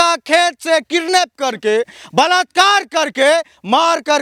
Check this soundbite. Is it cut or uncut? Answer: uncut